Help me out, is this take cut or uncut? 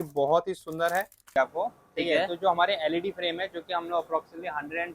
cut